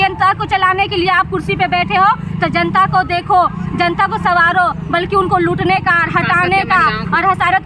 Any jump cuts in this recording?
no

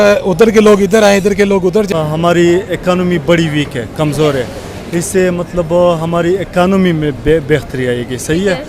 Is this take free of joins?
no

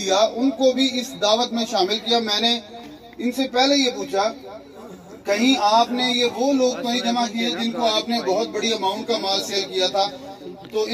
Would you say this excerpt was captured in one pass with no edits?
yes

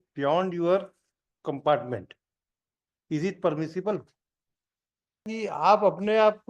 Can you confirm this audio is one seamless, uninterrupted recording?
no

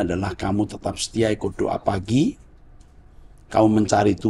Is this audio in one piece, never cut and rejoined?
yes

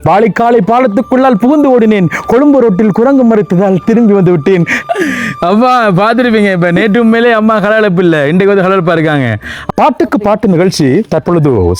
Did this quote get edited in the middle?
yes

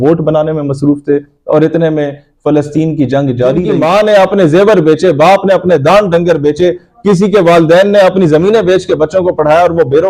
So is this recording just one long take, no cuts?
no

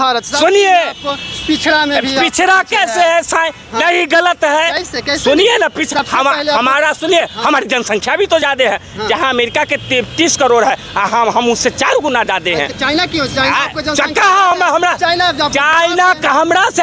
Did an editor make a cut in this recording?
no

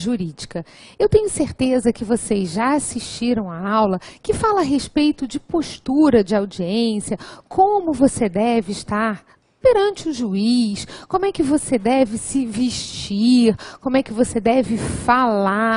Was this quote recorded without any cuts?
yes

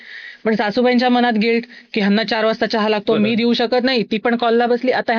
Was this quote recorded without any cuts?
yes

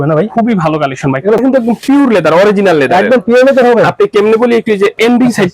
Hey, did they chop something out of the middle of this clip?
yes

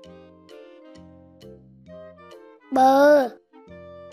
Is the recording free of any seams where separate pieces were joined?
no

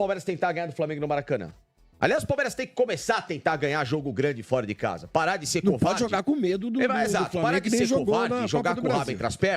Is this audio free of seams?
yes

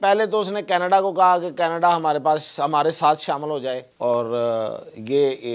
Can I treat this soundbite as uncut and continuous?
no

